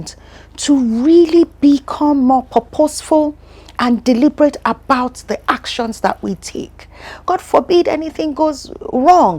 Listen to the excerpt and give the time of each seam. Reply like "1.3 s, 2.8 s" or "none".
7.2 s